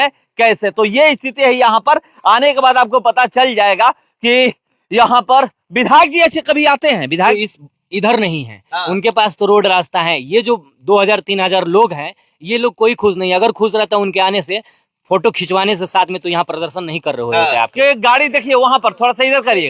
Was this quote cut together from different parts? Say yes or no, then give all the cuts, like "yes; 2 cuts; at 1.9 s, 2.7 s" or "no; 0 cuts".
yes; 2 cuts; at 7.3 s, 17.7 s